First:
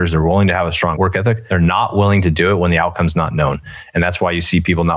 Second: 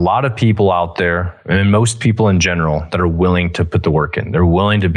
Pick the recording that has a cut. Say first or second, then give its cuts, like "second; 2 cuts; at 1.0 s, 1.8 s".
first; 1 cut; at 1.0 s